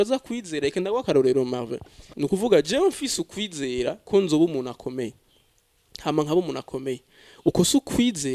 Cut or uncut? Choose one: cut